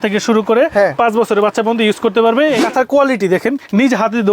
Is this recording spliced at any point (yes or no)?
yes